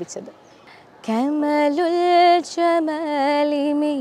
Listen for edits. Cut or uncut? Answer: uncut